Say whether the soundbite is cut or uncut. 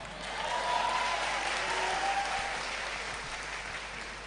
uncut